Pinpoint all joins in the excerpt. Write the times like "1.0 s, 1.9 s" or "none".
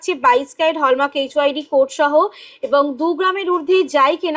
none